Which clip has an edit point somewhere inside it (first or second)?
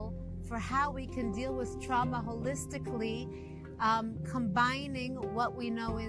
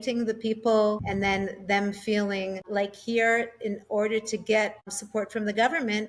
second